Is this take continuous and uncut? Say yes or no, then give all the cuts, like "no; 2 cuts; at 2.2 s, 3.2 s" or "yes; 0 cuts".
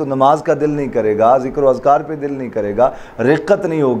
yes; 0 cuts